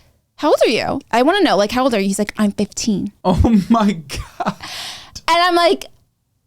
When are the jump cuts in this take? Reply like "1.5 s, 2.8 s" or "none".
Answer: 1.0 s